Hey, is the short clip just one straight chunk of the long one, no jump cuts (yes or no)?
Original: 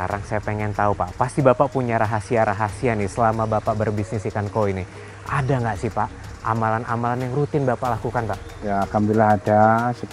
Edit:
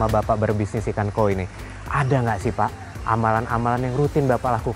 yes